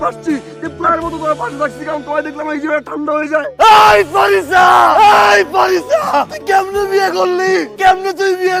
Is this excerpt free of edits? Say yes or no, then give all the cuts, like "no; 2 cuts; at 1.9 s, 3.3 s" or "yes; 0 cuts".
no; 1 cut; at 3.6 s